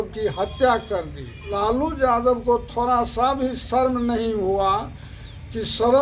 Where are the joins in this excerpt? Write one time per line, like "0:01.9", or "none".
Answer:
0:01.6